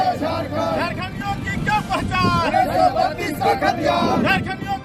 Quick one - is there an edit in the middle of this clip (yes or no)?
no